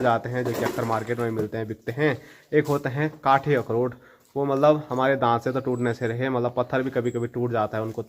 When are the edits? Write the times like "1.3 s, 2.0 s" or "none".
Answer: none